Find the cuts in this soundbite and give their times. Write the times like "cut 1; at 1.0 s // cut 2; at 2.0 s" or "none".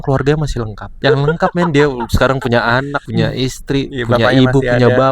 cut 1; at 1.0 s // cut 2; at 3.0 s